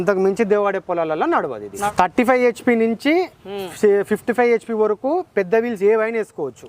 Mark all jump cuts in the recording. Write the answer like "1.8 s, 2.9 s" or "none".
1.9 s